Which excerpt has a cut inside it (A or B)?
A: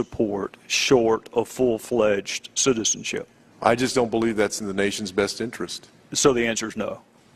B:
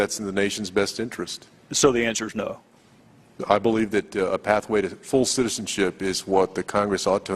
B